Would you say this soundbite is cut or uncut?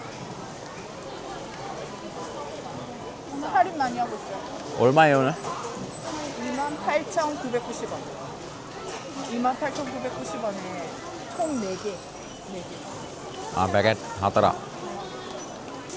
uncut